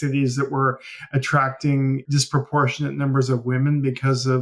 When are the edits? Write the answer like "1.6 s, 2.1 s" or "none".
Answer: 2.1 s